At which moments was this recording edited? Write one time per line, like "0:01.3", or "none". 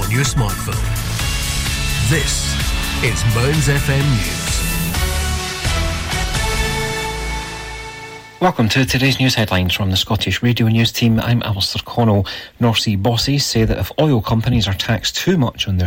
0:08.2